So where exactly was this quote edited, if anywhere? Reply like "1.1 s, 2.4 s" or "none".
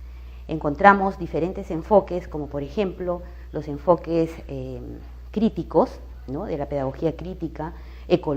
3.9 s